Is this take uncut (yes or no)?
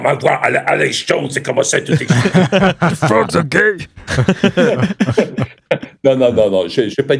yes